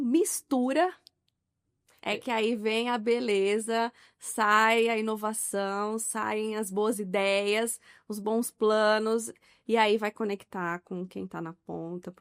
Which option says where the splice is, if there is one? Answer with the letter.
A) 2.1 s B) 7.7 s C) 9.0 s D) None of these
D